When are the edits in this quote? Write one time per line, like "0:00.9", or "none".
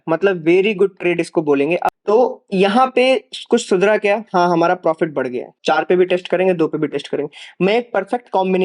0:02.0
0:05.5